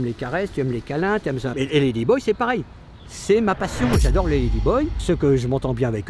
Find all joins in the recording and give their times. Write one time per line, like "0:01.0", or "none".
0:01.5
0:05.0